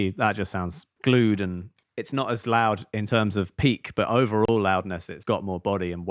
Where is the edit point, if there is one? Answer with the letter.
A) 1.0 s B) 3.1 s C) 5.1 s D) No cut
C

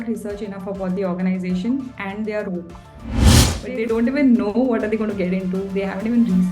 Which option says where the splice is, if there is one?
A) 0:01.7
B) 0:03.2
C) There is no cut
B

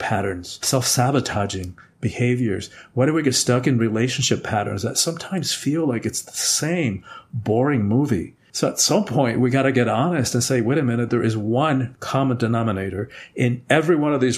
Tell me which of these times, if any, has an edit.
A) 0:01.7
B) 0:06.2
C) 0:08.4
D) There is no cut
C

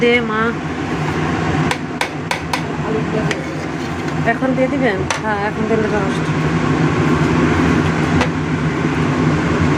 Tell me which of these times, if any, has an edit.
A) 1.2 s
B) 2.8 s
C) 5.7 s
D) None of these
D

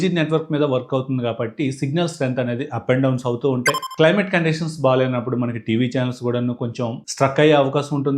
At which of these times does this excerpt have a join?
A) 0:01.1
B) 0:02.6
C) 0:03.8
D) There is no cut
C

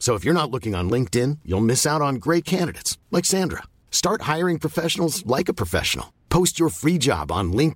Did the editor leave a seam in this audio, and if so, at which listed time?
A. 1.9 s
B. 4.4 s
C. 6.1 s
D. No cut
D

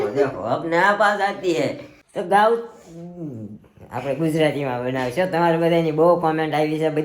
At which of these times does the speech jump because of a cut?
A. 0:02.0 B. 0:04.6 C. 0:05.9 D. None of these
A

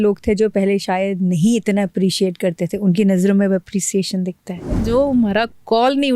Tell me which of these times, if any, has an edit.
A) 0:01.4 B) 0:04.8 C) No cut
B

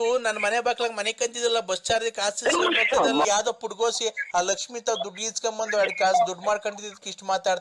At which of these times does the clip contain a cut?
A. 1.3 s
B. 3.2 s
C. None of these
B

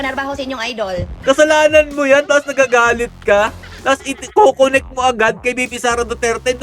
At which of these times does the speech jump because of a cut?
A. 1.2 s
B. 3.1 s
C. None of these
A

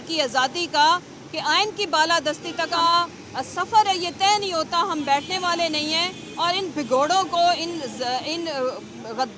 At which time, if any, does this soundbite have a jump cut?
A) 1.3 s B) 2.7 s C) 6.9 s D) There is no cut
B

